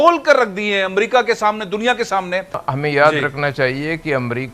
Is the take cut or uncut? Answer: cut